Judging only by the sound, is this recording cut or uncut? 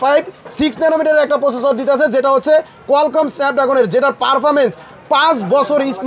uncut